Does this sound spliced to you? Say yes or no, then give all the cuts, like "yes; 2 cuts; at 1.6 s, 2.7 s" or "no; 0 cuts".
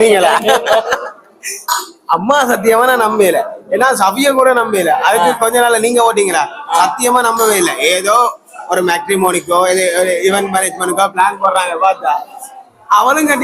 no; 0 cuts